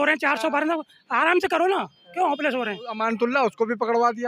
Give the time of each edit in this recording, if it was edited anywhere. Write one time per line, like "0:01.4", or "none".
0:02.9